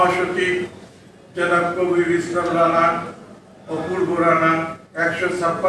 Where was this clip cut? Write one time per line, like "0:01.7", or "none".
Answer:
none